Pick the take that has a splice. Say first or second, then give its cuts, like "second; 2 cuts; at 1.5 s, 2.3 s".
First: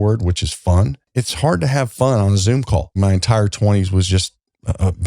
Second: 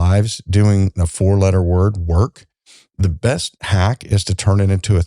first; 2 cuts; at 1.1 s, 3.0 s